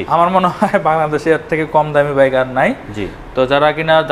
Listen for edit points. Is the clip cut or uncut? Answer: uncut